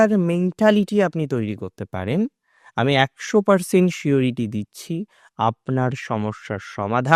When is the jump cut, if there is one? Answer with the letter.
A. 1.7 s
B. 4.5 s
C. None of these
C